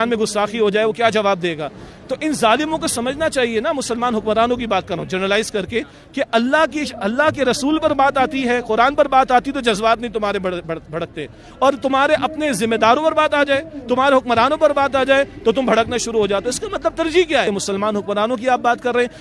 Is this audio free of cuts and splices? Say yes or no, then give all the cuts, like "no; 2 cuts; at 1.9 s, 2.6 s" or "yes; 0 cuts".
no; 1 cut; at 17.5 s